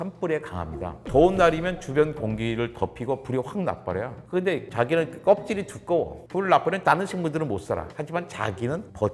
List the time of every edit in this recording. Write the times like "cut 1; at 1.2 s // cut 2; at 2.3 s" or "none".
cut 1; at 1.0 s // cut 2; at 6.2 s